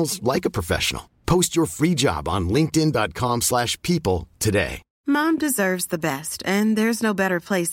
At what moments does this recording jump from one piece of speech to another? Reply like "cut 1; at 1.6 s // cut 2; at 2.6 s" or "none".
cut 1; at 4.9 s